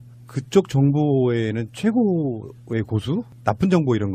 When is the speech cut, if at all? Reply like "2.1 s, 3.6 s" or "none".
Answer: none